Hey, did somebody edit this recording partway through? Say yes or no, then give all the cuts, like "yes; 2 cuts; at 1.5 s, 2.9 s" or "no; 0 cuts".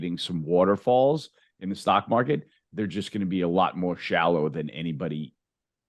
no; 0 cuts